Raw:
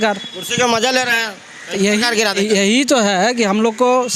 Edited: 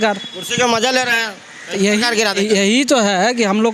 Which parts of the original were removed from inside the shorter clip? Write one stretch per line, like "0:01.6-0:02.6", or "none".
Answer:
none